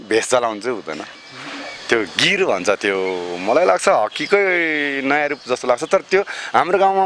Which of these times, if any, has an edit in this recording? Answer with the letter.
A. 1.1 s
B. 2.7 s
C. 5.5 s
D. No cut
A